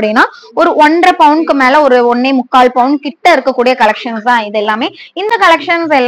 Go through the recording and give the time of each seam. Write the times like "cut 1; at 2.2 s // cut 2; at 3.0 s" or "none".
none